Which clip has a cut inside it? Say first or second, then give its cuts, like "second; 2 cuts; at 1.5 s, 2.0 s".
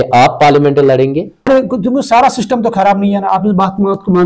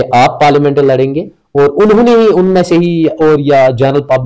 first; 1 cut; at 1.5 s